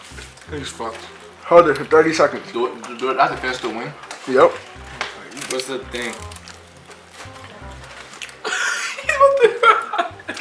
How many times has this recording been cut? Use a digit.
0